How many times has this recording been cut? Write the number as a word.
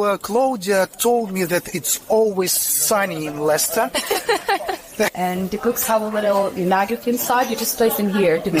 one